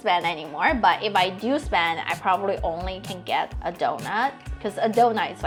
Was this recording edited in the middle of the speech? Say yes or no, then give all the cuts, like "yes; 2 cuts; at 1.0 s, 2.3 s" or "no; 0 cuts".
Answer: no; 0 cuts